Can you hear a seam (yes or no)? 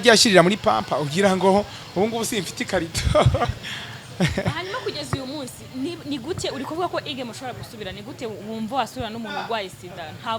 no